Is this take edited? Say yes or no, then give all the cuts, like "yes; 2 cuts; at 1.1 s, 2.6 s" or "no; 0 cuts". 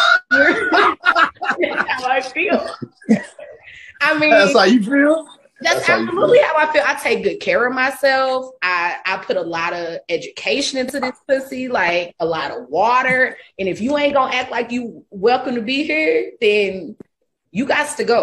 no; 0 cuts